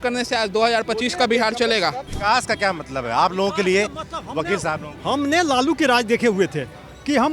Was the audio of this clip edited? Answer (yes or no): yes